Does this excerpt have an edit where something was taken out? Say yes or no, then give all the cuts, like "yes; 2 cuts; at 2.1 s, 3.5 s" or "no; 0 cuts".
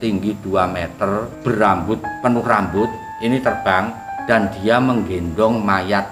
yes; 4 cuts; at 1.3 s, 2.1 s, 3.1 s, 4.1 s